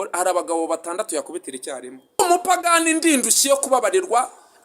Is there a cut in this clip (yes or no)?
yes